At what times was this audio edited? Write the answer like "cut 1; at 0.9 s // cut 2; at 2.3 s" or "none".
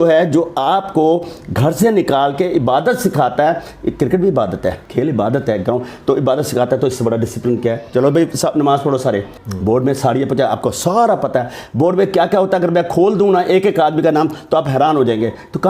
cut 1; at 4.8 s // cut 2; at 9.3 s